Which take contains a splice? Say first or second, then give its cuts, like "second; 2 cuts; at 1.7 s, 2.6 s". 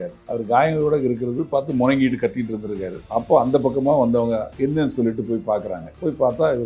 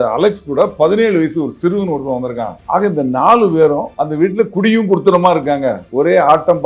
first; 2 cuts; at 2.9 s, 4.5 s